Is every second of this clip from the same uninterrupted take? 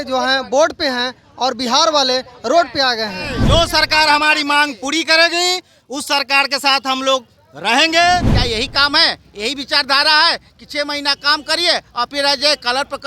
no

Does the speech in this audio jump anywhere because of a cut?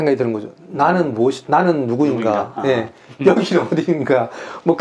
no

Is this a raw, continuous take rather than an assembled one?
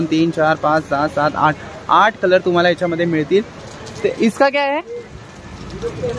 yes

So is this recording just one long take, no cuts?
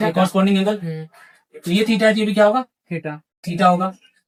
yes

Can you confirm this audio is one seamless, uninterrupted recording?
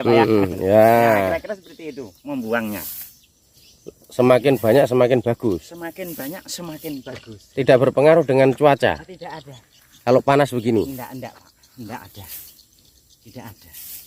yes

